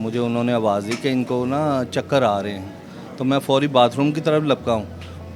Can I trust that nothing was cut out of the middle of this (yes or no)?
yes